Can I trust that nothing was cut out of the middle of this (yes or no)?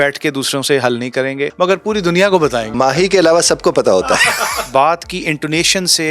no